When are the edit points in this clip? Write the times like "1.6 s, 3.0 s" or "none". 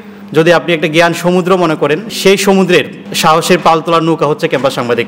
none

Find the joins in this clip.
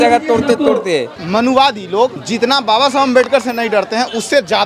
1.1 s, 2.2 s

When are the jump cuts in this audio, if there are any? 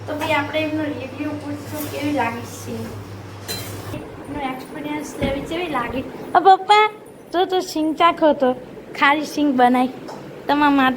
3.9 s

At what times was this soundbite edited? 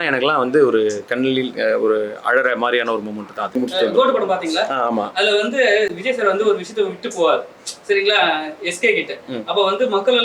3.6 s

